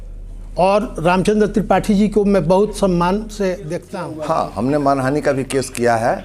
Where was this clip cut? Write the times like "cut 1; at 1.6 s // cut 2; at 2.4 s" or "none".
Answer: cut 1; at 3.8 s